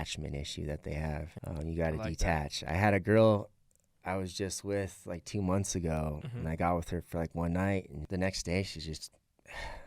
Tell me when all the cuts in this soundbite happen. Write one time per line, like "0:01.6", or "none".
0:01.3
0:08.0